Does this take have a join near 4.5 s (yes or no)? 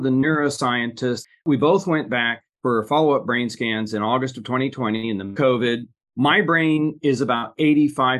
no